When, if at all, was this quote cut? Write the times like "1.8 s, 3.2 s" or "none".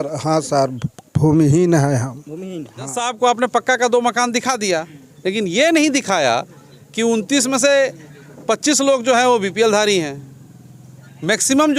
3.0 s